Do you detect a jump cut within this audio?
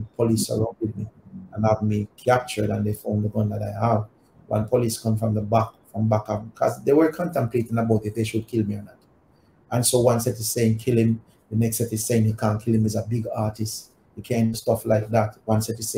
no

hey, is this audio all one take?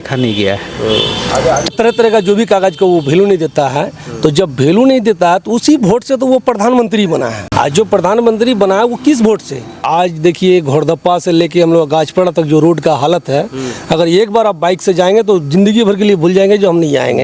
no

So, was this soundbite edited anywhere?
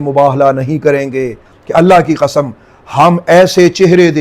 yes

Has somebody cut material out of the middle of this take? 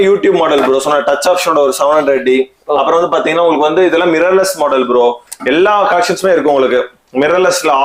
no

